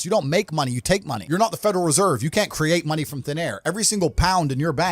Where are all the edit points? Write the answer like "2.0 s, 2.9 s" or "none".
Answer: 1.1 s